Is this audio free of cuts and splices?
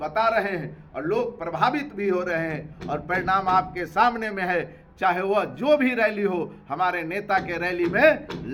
yes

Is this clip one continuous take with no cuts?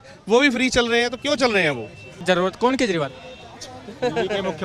no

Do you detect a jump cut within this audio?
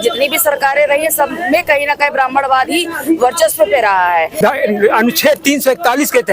yes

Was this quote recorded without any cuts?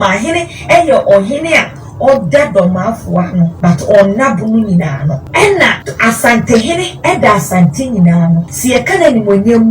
no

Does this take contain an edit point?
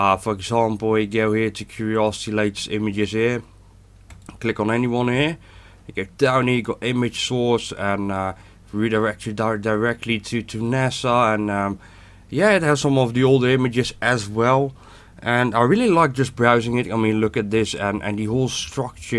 yes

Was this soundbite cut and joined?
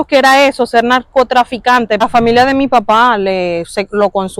yes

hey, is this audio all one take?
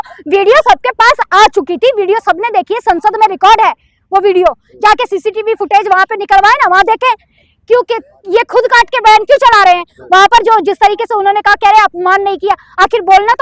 yes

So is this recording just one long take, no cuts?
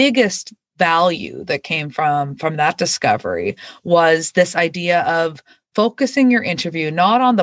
yes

